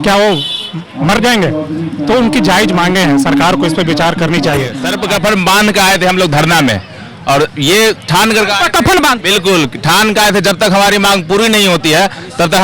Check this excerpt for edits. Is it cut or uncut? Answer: cut